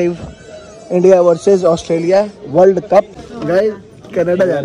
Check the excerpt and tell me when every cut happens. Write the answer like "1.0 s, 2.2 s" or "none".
2.3 s, 3.2 s